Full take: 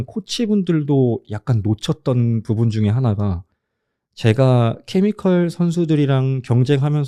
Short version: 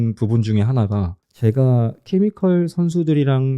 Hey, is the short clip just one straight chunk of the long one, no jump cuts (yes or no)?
no